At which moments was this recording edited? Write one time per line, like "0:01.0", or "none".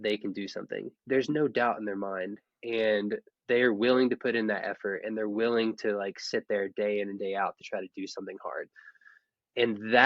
0:01.0
0:08.7